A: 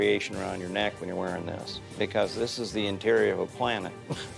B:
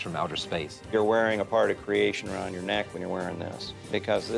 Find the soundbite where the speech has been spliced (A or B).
B